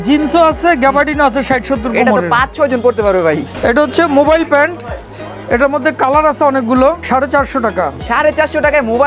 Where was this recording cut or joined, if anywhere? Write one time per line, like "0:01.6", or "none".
0:03.6
0:07.0